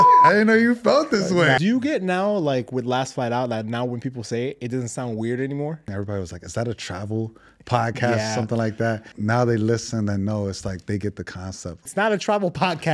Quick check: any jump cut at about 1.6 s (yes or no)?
yes